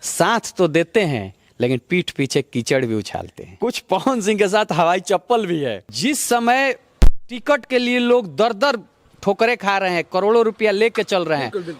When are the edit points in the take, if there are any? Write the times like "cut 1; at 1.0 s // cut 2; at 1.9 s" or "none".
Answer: cut 1; at 3.4 s // cut 2; at 5.9 s